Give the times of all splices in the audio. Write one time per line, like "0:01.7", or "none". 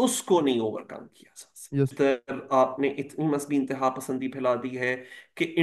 0:01.9